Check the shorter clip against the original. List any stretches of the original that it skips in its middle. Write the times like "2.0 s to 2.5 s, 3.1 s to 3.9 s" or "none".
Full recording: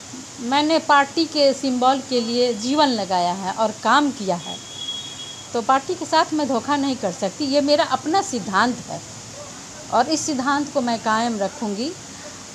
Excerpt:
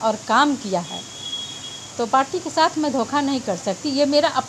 none